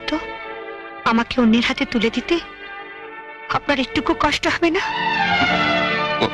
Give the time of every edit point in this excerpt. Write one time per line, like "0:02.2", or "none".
none

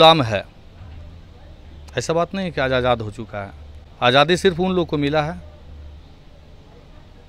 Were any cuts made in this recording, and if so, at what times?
none

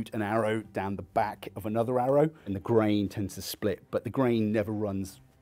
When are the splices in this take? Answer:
none

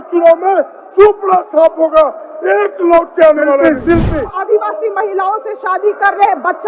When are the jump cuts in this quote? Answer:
0:04.1

